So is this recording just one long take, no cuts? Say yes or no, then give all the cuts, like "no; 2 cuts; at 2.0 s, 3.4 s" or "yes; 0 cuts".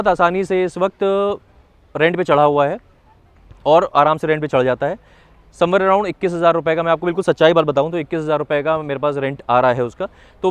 yes; 0 cuts